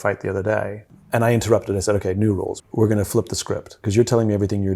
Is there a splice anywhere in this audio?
yes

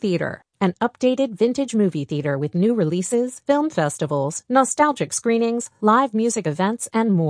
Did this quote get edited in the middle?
no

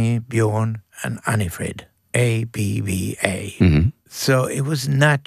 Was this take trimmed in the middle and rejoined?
yes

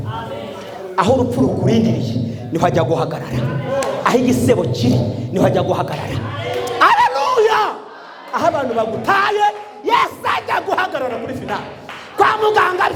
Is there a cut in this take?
no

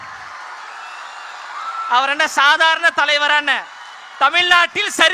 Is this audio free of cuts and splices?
yes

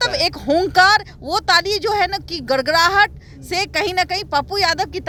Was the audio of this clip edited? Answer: no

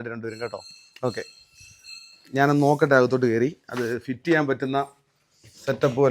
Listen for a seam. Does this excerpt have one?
no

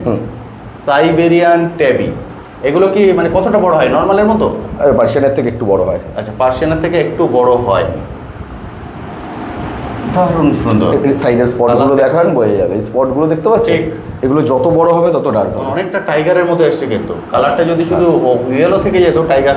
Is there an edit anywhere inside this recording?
no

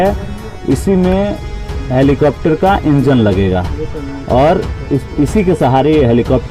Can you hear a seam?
no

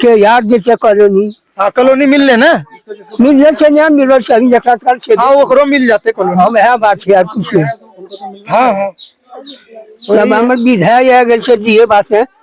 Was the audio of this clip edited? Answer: no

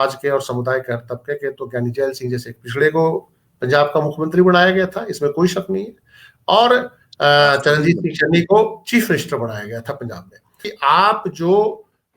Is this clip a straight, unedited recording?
no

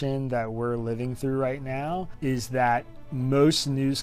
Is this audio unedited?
no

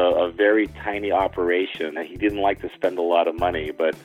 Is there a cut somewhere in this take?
yes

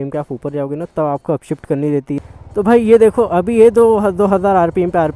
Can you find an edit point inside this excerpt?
yes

